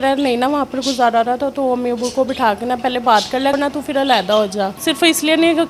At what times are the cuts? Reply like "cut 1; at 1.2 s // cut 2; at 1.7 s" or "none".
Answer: cut 1; at 3.5 s // cut 2; at 4.8 s